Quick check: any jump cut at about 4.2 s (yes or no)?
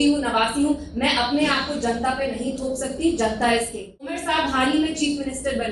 yes